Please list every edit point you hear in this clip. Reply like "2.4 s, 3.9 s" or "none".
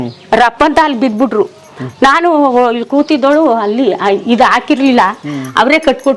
none